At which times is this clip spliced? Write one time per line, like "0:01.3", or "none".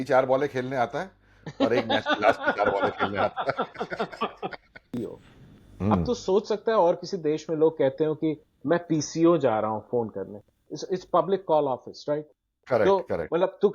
0:05.0